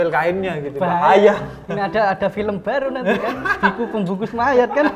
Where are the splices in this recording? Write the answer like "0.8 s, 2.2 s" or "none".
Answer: none